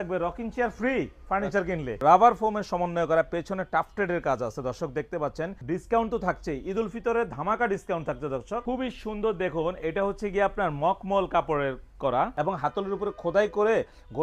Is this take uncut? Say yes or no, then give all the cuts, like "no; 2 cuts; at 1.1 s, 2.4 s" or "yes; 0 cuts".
no; 4 cuts; at 2.0 s, 5.6 s, 8.6 s, 12.3 s